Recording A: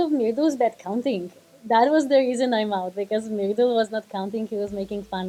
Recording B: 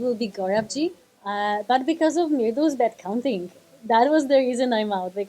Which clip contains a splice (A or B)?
B